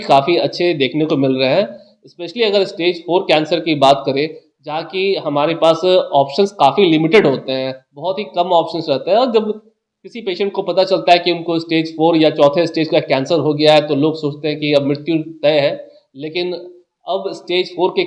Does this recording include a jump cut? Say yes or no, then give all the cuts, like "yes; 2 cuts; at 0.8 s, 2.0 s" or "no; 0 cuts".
no; 0 cuts